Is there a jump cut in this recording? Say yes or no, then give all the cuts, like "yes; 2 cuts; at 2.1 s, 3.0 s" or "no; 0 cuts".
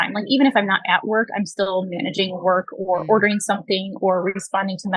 no; 0 cuts